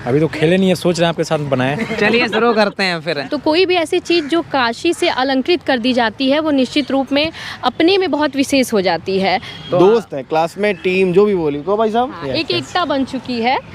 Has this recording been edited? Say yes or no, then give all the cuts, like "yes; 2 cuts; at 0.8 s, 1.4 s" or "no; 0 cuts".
yes; 2 cuts; at 3.2 s, 9.5 s